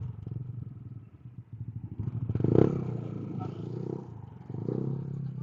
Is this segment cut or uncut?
uncut